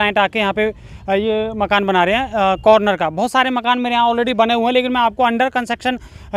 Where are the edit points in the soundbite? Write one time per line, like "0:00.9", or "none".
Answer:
none